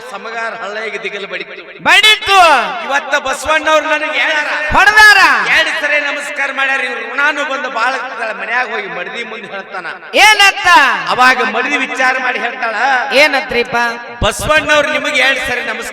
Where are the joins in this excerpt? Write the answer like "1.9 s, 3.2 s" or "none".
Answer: 4.4 s